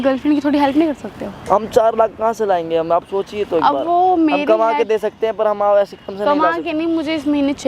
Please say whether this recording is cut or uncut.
uncut